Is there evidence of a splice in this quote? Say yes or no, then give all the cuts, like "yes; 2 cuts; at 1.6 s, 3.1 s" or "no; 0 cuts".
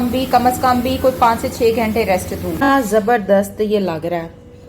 yes; 1 cut; at 2.1 s